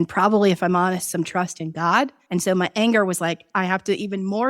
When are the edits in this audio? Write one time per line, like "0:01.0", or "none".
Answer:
0:02.2
0:03.5